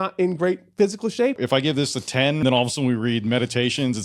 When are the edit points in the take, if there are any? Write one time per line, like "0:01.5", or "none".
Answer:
0:01.3
0:02.4